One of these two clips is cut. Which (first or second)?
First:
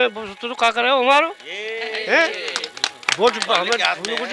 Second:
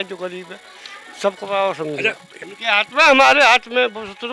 second